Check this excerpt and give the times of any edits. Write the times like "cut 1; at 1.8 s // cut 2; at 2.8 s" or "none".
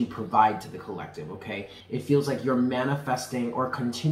cut 1; at 1.8 s